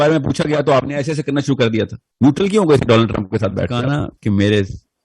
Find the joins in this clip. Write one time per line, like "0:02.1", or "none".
0:03.8

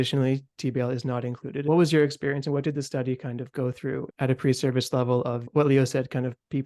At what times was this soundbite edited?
0:01.6
0:04.1
0:05.4

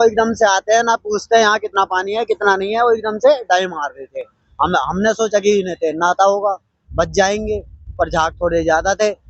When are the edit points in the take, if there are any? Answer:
none

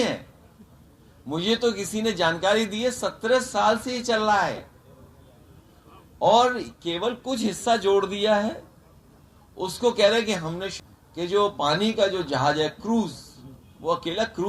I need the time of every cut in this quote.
0:10.7

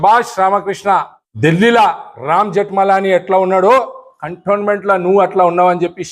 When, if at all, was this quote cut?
0:01.2

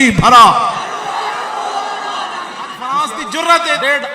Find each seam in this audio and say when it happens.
0:02.8

